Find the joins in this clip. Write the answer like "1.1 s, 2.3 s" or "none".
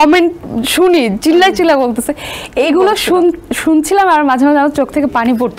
none